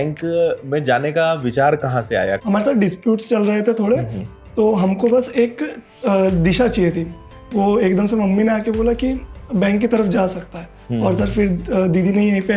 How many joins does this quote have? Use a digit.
1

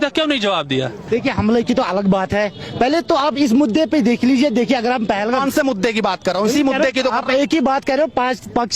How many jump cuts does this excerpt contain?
1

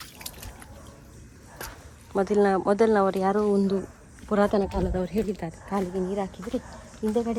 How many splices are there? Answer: 0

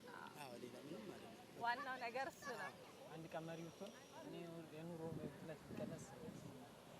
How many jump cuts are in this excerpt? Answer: 1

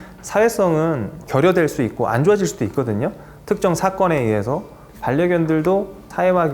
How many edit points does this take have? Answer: 1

